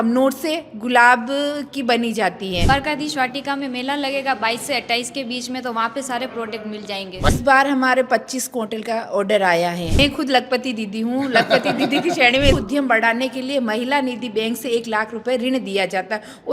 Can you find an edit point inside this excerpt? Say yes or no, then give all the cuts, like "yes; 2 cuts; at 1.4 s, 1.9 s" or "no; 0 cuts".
yes; 4 cuts; at 2.7 s, 7.3 s, 10.0 s, 12.5 s